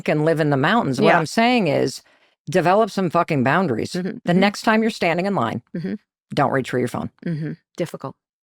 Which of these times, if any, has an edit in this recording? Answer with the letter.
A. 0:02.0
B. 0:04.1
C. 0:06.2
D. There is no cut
B